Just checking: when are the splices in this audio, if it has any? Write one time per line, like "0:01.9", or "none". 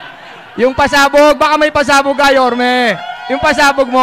none

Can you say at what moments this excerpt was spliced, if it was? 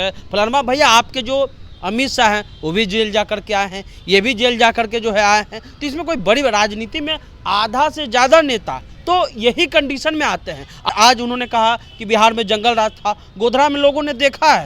0:10.9

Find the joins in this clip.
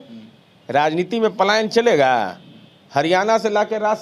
none

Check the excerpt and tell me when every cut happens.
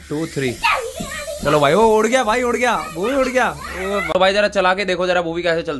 0:04.1

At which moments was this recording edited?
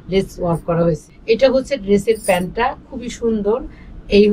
0:01.1

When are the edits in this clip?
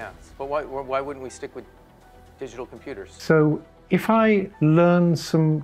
0:03.2

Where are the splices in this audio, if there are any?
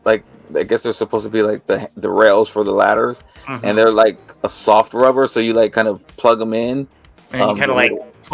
none

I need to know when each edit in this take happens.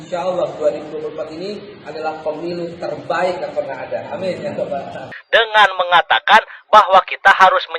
0:05.1

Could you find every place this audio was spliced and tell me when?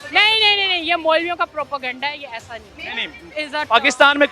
0:03.4

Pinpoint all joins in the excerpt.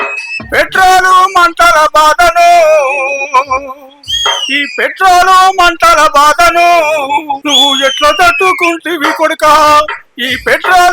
0:07.4

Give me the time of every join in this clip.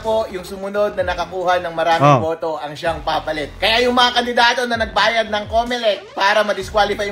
none

